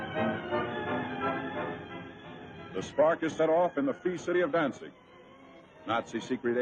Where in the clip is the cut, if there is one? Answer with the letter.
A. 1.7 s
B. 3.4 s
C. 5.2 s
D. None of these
D